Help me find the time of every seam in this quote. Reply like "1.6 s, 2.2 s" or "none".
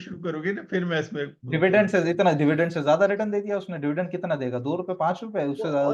none